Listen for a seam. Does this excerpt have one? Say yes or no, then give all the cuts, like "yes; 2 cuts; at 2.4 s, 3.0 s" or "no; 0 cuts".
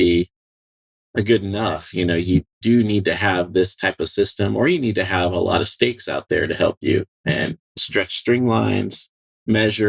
yes; 1 cut; at 2.6 s